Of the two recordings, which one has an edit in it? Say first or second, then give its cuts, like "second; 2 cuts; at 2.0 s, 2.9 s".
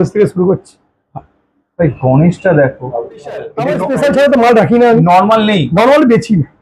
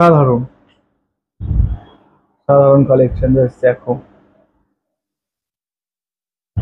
first; 1 cut; at 3.6 s